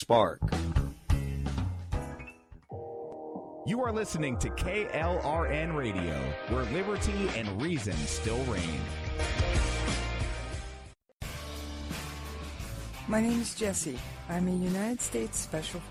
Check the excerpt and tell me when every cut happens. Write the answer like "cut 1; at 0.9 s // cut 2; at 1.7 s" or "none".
none